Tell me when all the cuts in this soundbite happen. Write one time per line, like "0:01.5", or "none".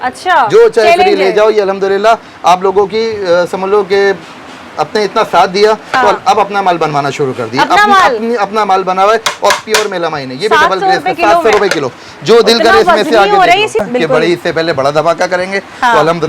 0:13.9